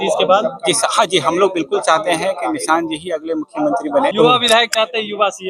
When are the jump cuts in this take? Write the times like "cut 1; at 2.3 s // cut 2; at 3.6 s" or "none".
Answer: cut 1; at 4.1 s